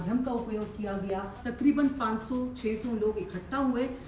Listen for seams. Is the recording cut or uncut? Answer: cut